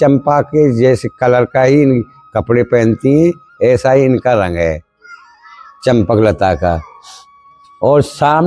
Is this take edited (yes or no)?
no